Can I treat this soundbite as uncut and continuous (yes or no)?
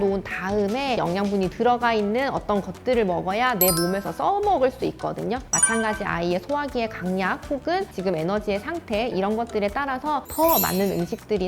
no